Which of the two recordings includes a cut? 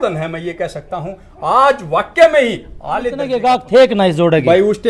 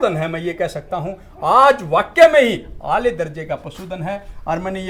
first; 1 cut; at 3.3 s

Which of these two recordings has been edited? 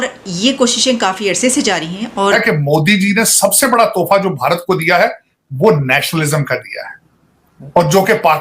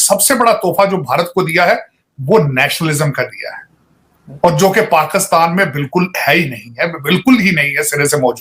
first; 1 cut; at 2.3 s

